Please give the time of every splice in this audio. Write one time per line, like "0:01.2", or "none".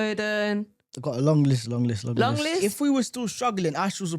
0:02.6